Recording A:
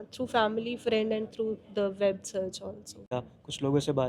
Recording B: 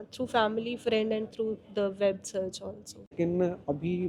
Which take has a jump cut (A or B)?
A